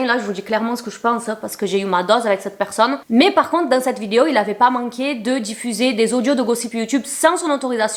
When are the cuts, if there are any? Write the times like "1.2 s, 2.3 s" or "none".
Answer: none